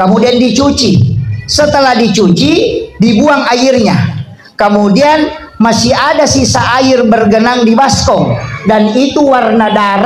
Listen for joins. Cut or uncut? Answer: uncut